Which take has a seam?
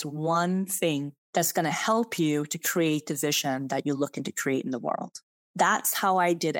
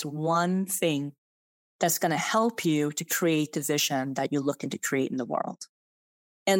first; 2 cuts; at 1.2 s, 5.4 s

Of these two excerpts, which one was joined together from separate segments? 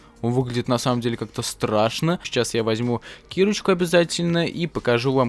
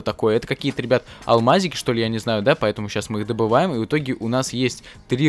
first; 1 cut; at 2.2 s

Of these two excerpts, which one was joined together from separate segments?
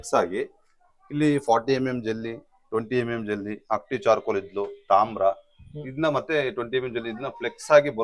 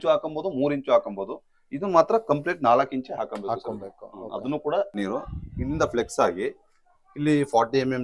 second; 1 cut; at 5.0 s

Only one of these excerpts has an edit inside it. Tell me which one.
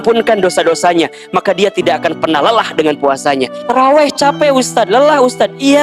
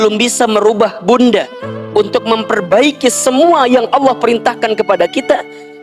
first; 1 cut; at 3.6 s

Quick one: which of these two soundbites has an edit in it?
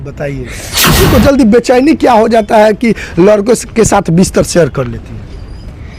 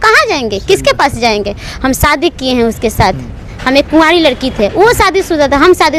first; 1 cut; at 1.0 s

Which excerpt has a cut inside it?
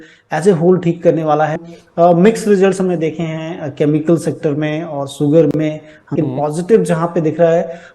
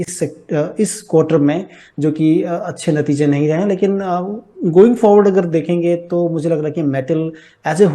first; 2 cuts; at 1.7 s, 6.1 s

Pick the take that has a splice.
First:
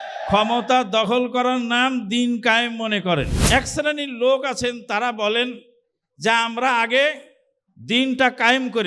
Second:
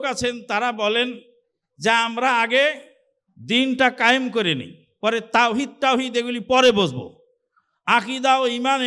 first; 1 cut; at 3.4 s

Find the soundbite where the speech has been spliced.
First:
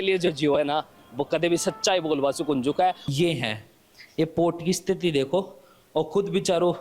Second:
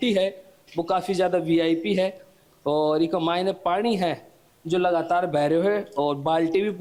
first; 1 cut; at 3.0 s

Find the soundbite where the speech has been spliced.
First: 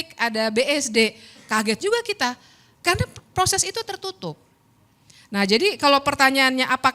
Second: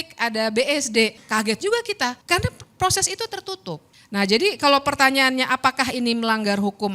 second; 3 cuts; at 1.2 s, 2.2 s, 3.9 s

